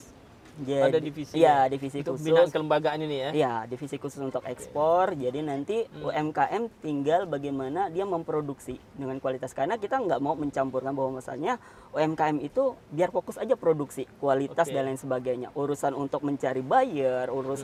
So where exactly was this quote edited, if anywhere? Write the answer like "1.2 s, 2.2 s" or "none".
none